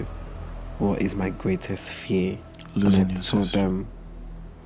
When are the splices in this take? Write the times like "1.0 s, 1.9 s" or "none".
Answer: 2.5 s